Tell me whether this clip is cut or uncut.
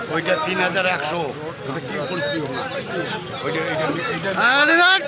uncut